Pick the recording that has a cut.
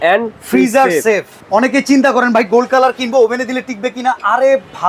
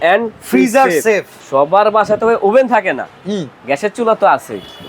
second; 1 cut; at 1.4 s

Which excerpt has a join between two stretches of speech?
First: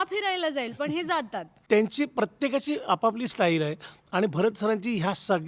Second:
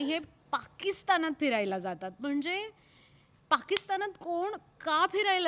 first; 1 cut; at 1.5 s

